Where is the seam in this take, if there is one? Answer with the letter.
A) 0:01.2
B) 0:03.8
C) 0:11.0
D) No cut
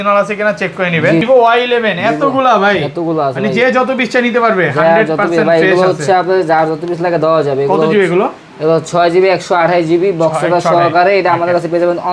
A